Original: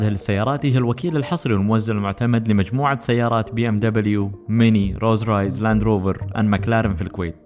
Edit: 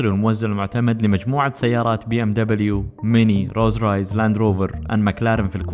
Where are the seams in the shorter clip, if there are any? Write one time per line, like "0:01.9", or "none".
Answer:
none